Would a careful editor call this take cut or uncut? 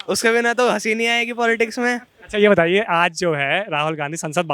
uncut